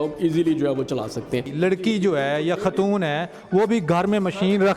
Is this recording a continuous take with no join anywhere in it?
no; 1 cut; at 1.5 s

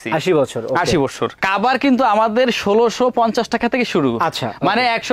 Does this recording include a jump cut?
yes; 1 cut; at 1.4 s

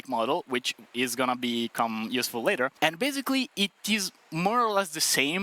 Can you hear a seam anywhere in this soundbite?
yes; 1 cut; at 2.7 s

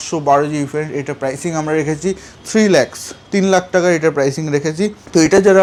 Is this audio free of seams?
yes; 0 cuts

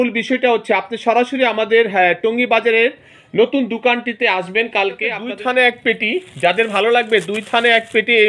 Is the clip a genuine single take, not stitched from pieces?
no; 1 cut; at 5.2 s

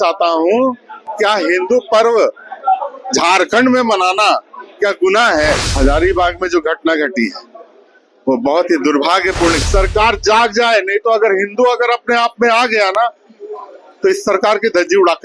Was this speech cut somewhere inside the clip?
yes; 2 cuts; at 5.7 s, 9.6 s

